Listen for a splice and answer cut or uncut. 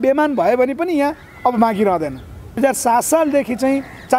cut